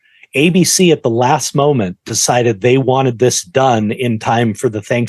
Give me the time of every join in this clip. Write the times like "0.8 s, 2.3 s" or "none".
none

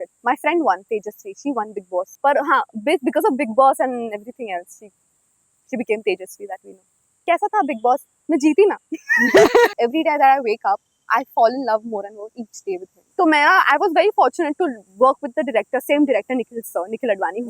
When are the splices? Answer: 2.1 s, 7.2 s, 9.7 s, 12.9 s

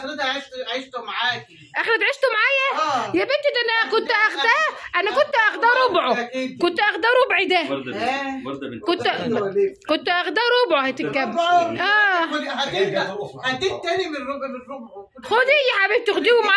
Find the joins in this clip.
none

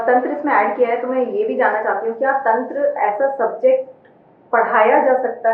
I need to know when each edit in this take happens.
none

